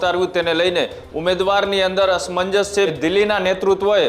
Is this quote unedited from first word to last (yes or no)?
no